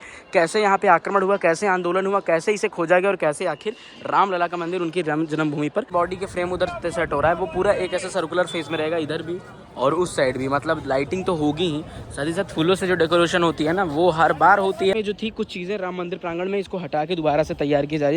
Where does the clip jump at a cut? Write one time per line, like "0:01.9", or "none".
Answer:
0:05.9
0:14.9